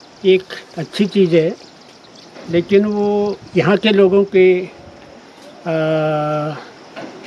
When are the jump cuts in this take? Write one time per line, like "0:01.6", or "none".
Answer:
none